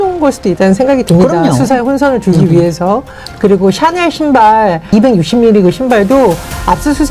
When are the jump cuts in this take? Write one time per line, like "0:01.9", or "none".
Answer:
0:04.9